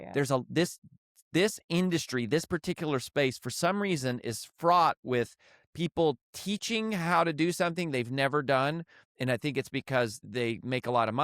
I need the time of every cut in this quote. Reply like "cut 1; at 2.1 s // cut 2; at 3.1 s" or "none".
cut 1; at 10.2 s